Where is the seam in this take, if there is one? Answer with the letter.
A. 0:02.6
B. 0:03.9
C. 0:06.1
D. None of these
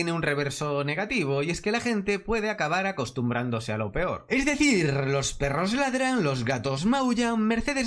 D